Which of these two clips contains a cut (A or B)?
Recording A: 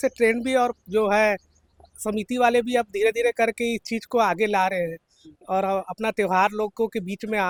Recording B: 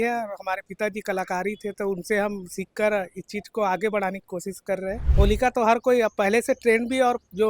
B